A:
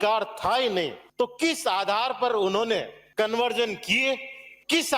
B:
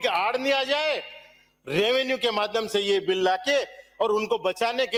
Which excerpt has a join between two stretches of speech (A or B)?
A